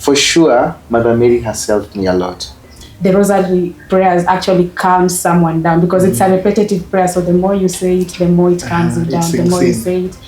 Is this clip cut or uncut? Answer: cut